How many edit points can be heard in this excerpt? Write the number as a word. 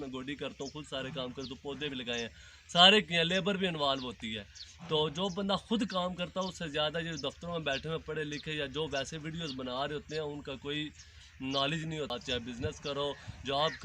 one